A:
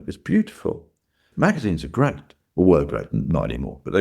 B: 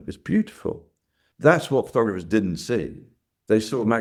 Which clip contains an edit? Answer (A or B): A